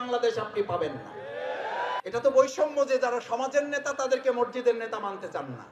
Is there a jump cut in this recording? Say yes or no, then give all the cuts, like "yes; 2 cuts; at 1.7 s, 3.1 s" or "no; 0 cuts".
yes; 1 cut; at 2.0 s